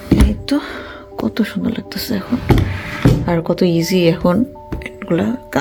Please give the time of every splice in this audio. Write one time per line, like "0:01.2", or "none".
none